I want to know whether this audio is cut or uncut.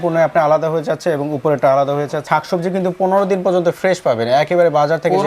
cut